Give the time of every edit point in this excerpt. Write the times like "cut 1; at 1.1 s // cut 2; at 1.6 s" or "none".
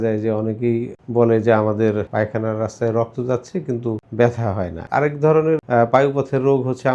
cut 1; at 1.0 s // cut 2; at 2.1 s // cut 3; at 4.0 s // cut 4; at 4.8 s // cut 5; at 5.6 s